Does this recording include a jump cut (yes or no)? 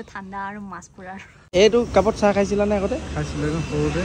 yes